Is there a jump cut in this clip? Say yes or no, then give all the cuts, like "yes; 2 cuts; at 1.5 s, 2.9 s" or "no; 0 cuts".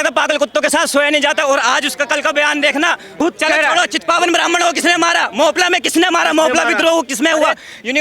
yes; 1 cut; at 3.1 s